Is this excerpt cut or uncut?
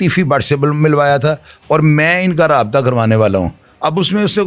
uncut